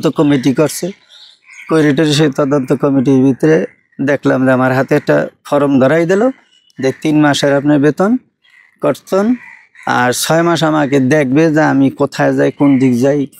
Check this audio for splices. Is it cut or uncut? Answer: uncut